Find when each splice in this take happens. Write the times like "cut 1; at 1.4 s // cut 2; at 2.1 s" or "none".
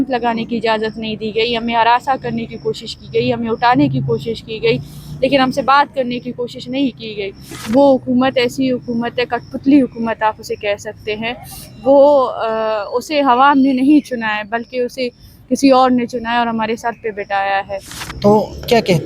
cut 1; at 7.6 s // cut 2; at 17.9 s